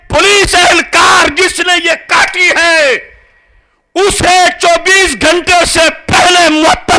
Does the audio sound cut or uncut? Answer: uncut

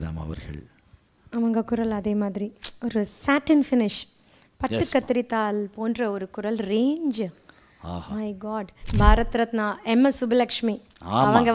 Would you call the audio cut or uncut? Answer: cut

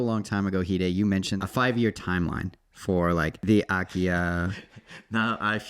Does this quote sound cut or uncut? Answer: cut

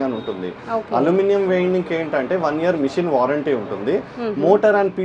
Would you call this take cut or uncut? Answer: uncut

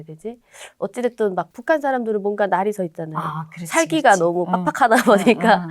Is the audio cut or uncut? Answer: cut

